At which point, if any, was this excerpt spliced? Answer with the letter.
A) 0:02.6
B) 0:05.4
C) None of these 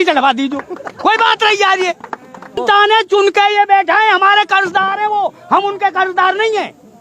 A